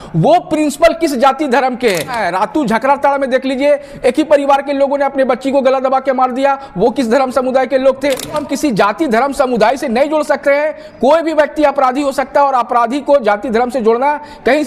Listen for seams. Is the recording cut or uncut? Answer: cut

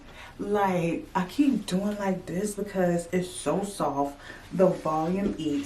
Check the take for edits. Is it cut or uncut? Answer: uncut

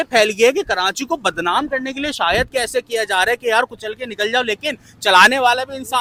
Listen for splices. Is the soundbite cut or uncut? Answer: uncut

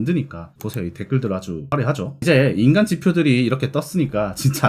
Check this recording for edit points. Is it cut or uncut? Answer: uncut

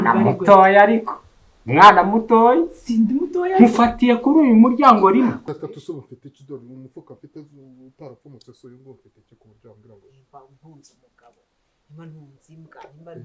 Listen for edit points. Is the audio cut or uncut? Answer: cut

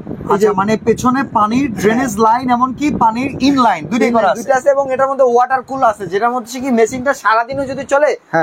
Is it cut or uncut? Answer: uncut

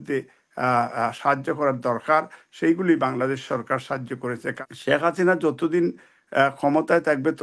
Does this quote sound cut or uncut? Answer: cut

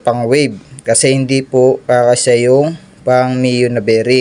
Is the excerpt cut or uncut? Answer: uncut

